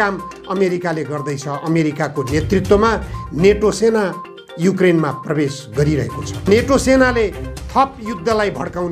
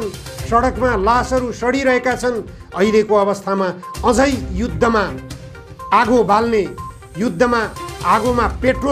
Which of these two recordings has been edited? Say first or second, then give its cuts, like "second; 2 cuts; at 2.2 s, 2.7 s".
first; 1 cut; at 6.5 s